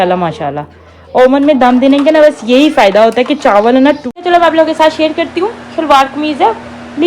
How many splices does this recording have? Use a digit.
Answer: 1